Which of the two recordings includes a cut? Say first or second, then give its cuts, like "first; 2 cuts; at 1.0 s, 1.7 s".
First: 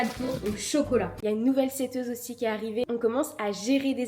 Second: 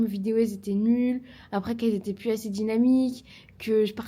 first; 2 cuts; at 1.2 s, 2.8 s